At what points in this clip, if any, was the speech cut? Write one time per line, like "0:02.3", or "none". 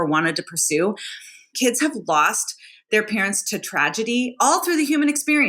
0:01.5